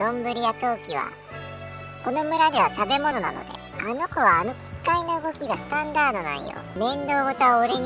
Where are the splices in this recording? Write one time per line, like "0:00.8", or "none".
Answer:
0:03.1
0:06.6

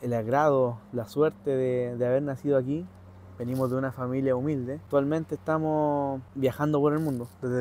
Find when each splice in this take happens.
0:04.8
0:06.2

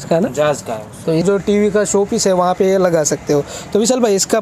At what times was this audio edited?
0:01.2

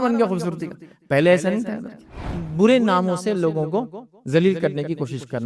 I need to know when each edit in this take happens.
0:02.2

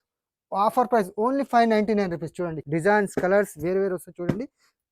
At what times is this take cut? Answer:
0:02.6

